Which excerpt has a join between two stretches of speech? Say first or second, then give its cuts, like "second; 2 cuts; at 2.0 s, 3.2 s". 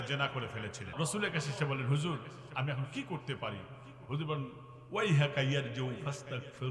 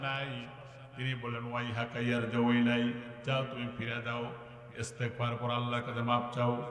first; 1 cut; at 0.9 s